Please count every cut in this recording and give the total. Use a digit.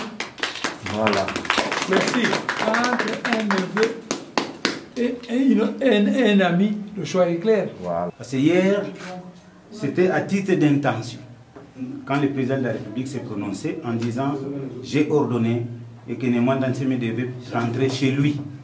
1